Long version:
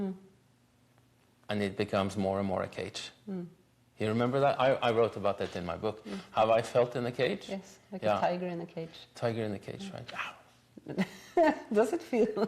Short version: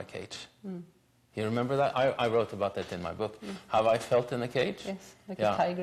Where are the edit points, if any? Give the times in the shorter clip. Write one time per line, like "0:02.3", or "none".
none